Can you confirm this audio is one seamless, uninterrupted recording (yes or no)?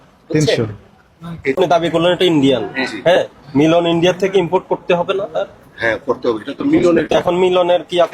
no